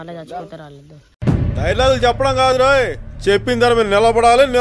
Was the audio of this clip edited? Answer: no; 0 cuts

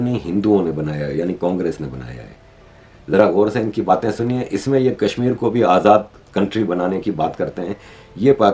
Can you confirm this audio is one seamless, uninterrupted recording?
yes; 0 cuts

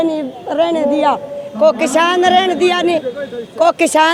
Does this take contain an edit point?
no; 0 cuts

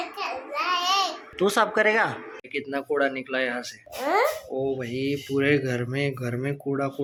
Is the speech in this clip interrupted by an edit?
no; 0 cuts

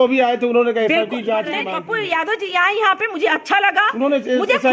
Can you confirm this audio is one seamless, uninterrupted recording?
no; 1 cut; at 1.7 s

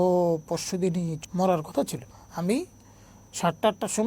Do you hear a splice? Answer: yes; 2 cuts; at 1.2 s, 2.0 s

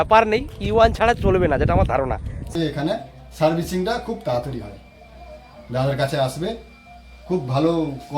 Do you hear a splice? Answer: yes; 1 cut; at 2.5 s

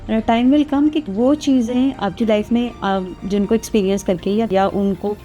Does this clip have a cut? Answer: yes; 2 cuts; at 1.1 s, 4.5 s

